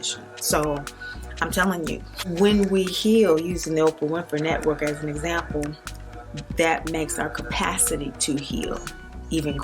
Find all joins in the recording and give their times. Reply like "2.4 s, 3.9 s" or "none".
2.3 s